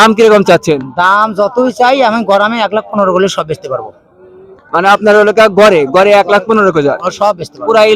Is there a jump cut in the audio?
no; 0 cuts

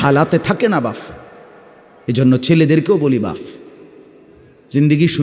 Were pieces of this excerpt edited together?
no; 0 cuts

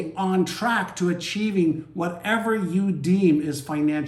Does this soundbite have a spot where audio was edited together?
no; 0 cuts

